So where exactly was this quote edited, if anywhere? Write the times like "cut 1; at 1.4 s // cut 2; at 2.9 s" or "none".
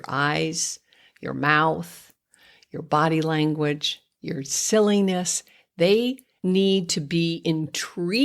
cut 1; at 6.3 s